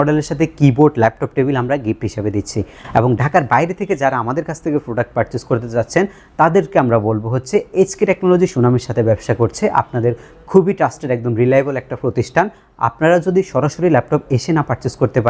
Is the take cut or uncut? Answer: uncut